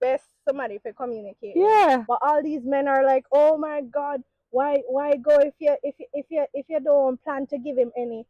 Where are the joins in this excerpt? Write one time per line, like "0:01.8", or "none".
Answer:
0:02.0